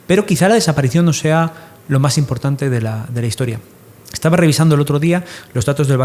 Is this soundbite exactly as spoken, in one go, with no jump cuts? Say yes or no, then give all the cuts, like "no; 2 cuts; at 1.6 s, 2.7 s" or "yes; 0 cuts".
yes; 0 cuts